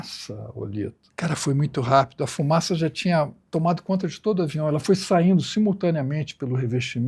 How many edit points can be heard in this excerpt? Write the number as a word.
two